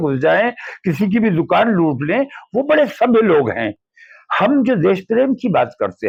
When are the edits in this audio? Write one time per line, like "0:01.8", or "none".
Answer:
none